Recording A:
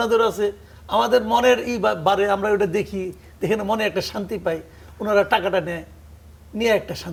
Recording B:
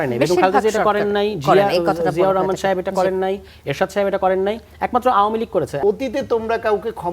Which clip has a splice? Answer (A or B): B